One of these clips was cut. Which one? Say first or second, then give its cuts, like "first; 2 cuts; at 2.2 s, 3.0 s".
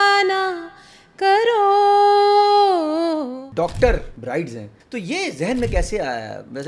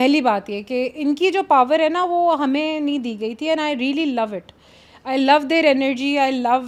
first; 2 cuts; at 3.4 s, 4.6 s